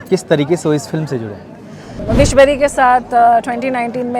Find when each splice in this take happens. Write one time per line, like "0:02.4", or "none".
0:02.0